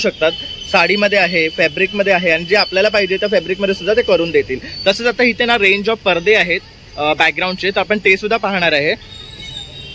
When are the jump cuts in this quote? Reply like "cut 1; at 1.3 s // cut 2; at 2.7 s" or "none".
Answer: none